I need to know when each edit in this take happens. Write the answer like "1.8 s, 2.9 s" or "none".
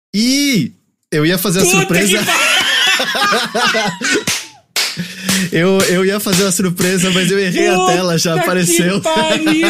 0.9 s